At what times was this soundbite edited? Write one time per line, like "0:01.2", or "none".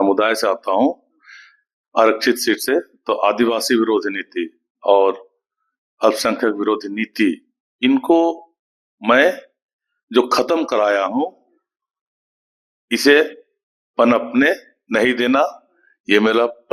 none